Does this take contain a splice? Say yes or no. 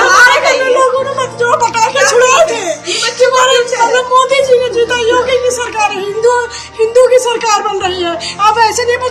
no